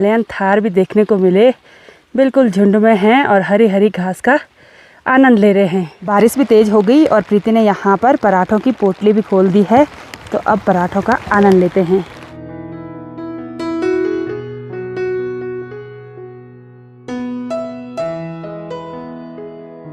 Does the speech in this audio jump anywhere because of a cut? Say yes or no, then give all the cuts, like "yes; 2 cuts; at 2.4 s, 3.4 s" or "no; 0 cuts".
no; 0 cuts